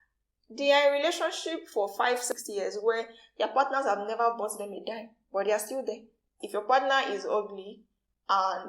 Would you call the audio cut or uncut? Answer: cut